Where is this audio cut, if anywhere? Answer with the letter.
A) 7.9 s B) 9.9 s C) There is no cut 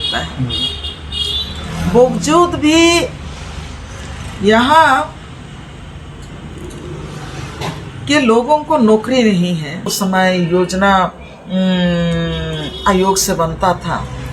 B